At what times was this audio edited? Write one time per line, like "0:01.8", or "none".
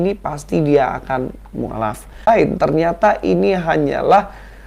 0:02.3